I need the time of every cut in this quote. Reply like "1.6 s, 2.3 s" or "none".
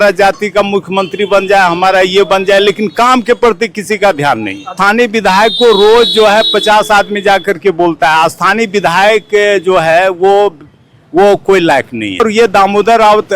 4.7 s, 12.2 s